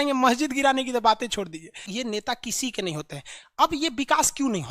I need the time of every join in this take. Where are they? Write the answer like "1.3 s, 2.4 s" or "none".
1.9 s